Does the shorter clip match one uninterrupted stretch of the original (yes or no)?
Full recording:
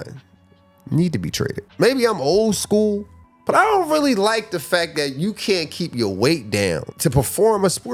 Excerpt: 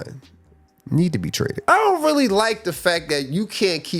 no